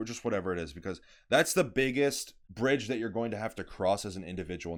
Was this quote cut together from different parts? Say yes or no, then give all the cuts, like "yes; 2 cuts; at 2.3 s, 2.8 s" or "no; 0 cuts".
no; 0 cuts